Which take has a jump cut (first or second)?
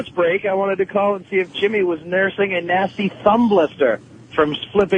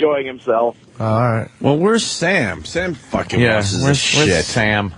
second